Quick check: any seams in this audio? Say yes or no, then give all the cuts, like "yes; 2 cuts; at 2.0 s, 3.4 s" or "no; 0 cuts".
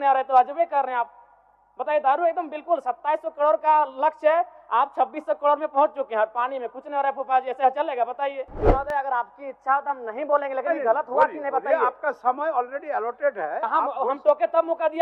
yes; 1 cut; at 8.6 s